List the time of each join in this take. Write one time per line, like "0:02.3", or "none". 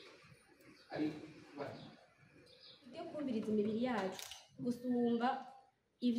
0:03.1